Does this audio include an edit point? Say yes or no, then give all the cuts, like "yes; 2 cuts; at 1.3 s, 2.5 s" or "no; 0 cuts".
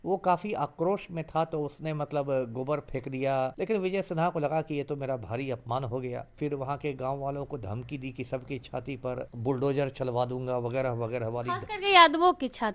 yes; 3 cuts; at 3.5 s, 6.3 s, 9.3 s